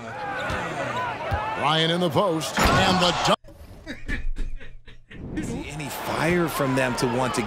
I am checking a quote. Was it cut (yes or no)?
yes